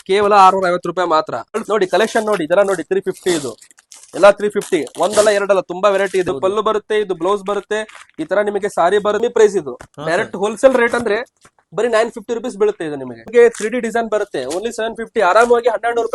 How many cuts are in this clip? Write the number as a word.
four